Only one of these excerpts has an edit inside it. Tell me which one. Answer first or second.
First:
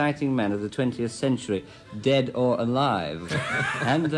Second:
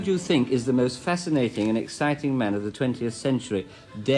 first